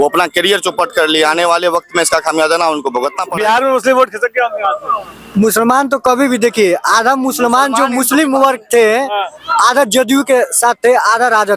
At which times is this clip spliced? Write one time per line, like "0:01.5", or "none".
0:03.2